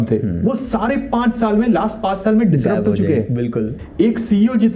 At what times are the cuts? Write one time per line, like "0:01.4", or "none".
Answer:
0:03.8